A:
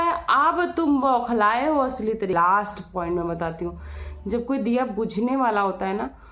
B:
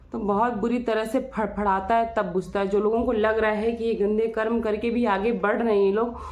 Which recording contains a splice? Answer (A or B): A